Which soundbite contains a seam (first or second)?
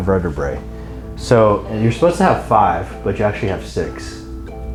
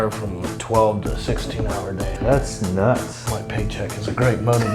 second